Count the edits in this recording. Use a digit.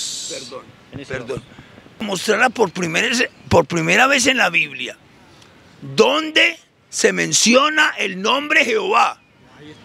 1